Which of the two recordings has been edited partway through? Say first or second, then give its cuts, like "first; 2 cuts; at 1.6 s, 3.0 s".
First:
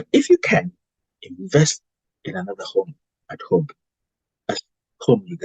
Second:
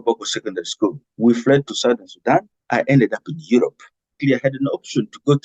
second; 3 cuts; at 1.0 s, 2.6 s, 4.2 s